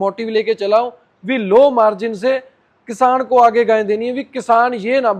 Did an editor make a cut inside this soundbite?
no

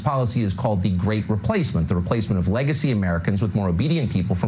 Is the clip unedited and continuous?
yes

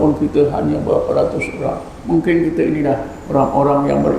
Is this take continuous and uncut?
no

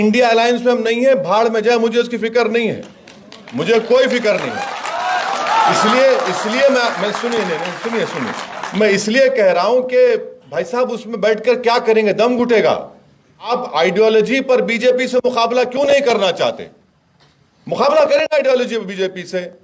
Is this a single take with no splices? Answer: no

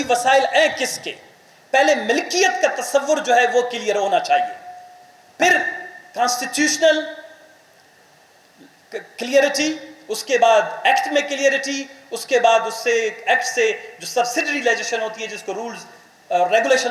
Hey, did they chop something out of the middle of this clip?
no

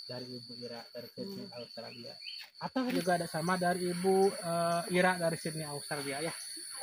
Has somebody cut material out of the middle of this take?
yes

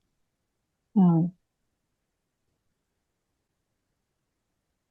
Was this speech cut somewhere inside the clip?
no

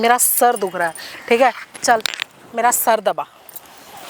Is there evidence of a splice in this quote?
no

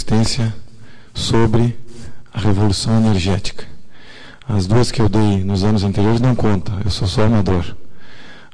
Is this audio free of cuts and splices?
yes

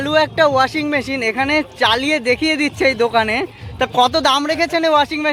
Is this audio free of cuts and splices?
yes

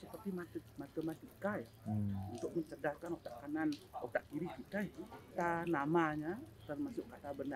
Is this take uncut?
no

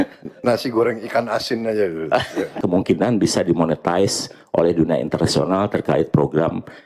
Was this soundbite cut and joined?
yes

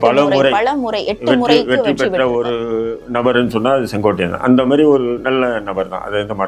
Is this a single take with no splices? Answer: yes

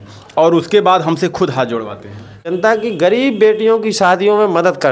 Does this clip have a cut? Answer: yes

